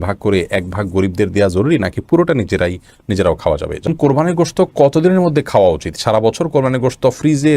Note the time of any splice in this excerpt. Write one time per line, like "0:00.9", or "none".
0:03.9